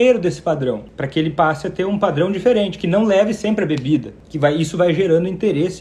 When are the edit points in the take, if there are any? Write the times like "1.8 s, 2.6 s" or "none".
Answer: 0.9 s, 4.2 s